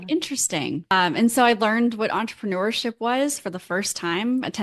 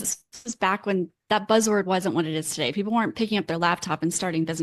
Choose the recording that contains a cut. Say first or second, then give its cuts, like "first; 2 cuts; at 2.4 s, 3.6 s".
first; 1 cut; at 0.9 s